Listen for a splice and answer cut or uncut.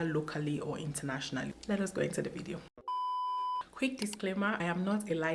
uncut